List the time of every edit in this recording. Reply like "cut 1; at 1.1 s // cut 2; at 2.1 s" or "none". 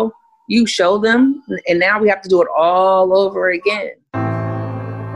cut 1; at 4.0 s